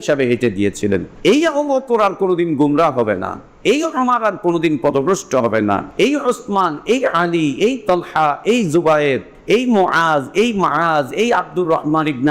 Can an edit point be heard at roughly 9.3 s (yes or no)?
yes